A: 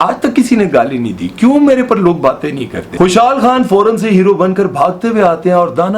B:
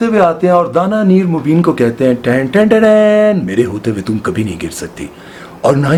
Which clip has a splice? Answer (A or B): A